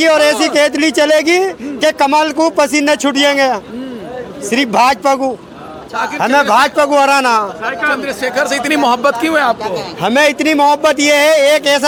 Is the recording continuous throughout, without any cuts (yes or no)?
yes